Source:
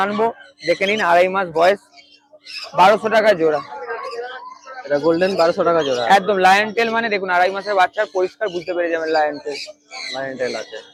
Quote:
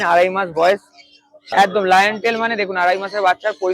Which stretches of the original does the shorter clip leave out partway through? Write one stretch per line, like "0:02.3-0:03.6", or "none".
0:02.5-0:06.0